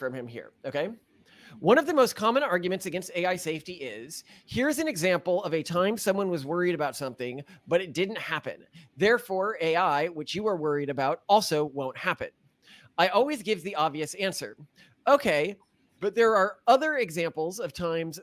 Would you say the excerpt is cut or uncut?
uncut